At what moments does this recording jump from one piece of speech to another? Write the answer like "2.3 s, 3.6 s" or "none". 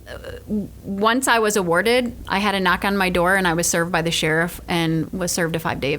2.2 s